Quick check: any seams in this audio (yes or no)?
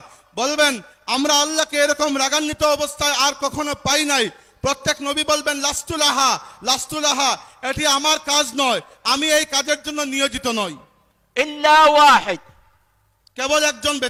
no